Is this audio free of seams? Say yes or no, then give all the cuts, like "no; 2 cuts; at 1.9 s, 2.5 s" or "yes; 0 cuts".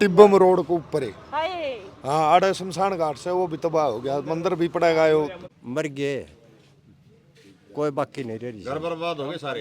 no; 1 cut; at 5.4 s